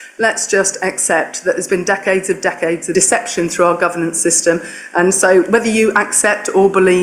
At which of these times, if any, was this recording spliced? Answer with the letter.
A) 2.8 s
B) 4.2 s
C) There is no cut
A